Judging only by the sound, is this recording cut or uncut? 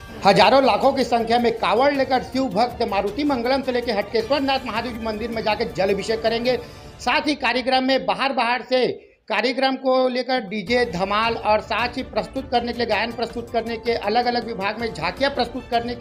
uncut